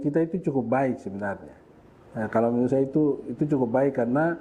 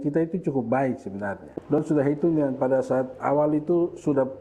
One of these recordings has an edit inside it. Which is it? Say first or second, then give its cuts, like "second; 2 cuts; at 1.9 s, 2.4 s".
second; 1 cut; at 1.8 s